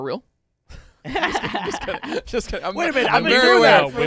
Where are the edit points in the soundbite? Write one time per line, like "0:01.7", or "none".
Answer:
none